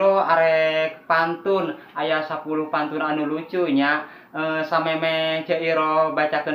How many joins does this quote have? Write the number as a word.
zero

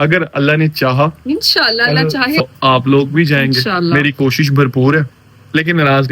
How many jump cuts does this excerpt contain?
two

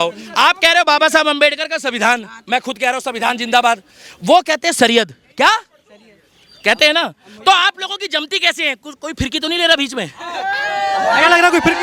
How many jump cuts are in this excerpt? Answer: zero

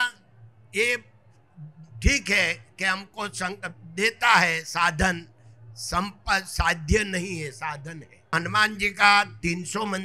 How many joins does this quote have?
one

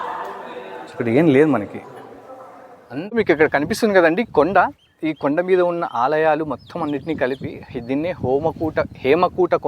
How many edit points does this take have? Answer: one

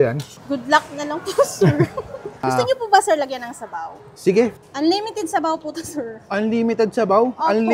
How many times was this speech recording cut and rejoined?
two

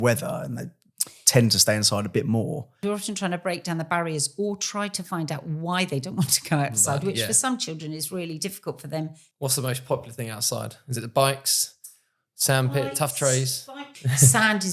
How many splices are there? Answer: three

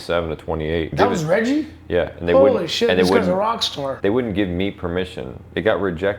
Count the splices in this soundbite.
two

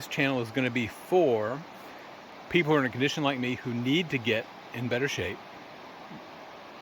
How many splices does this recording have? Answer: zero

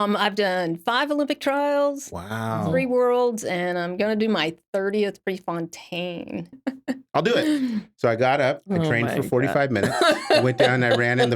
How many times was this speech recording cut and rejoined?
one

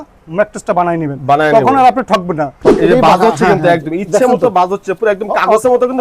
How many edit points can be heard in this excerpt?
one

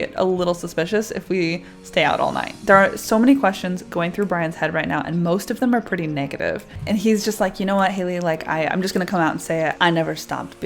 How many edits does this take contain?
three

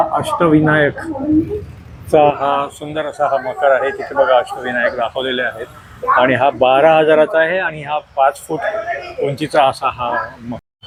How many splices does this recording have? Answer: zero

